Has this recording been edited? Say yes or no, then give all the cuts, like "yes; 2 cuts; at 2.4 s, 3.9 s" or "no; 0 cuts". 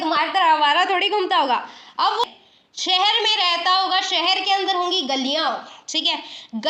yes; 1 cut; at 2.2 s